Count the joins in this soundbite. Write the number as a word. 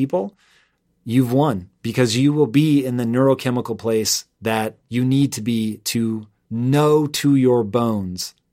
two